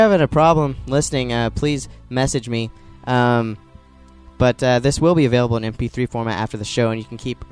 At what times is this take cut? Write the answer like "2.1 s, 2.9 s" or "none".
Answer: none